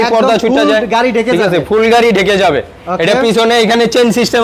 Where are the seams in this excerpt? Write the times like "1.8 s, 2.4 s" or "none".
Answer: none